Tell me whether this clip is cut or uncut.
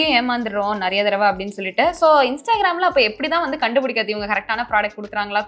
uncut